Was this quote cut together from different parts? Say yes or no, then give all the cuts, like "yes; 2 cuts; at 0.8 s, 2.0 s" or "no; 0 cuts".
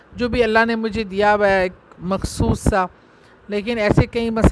no; 0 cuts